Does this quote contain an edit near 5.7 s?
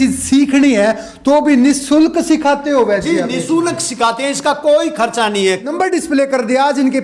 yes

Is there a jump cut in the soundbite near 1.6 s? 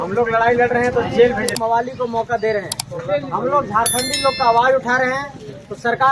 yes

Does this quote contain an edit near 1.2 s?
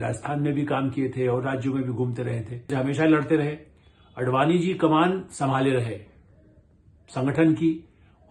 no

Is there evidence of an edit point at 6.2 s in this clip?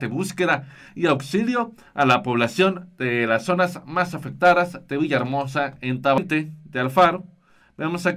yes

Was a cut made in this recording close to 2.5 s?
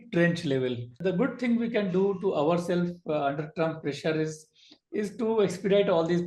no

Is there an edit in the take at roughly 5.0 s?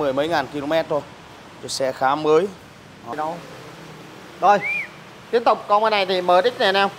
no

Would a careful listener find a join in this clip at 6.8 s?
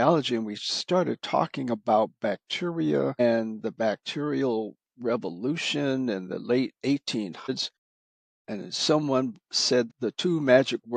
no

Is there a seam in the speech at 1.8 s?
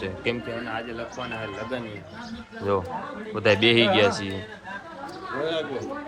no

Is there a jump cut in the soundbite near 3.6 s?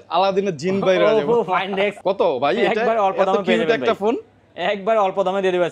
no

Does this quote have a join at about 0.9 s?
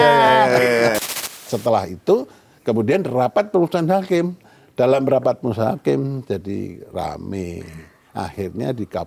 yes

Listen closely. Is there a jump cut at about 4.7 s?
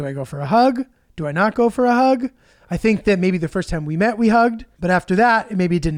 yes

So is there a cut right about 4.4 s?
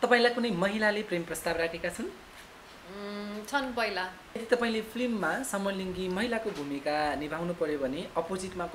yes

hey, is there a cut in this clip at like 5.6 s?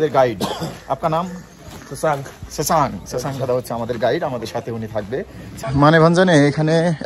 yes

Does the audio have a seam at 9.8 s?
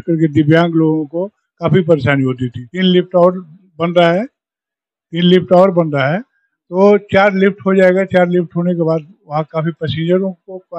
no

